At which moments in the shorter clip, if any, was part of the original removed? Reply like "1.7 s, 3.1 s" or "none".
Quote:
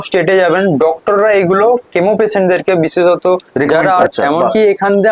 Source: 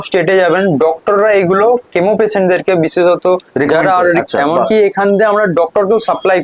4.1 s